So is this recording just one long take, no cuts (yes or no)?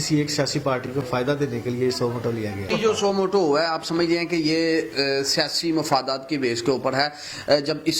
no